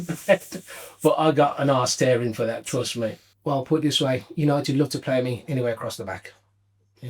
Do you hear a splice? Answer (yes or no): yes